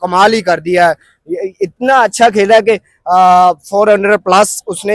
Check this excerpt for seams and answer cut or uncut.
uncut